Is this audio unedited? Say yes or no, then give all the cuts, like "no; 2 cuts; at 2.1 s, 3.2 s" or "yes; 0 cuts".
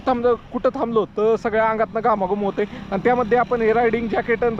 yes; 0 cuts